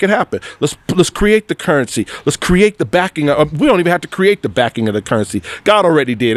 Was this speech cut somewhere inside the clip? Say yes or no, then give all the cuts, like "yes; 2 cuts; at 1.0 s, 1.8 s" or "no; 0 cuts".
no; 0 cuts